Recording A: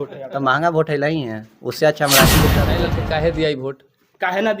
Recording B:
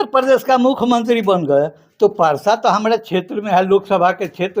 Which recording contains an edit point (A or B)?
A